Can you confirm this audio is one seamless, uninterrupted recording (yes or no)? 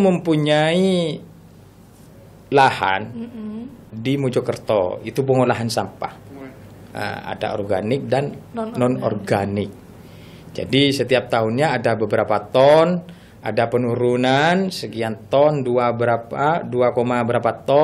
yes